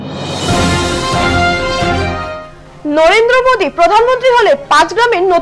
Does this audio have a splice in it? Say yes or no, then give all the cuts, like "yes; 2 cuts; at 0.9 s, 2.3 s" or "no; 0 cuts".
yes; 1 cut; at 1.9 s